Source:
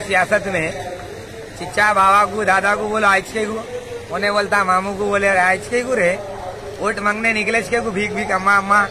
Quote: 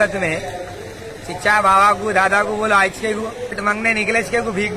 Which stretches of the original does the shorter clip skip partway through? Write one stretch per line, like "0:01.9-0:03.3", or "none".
0:03.9-0:07.0